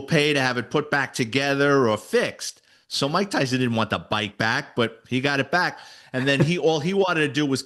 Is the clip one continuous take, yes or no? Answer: yes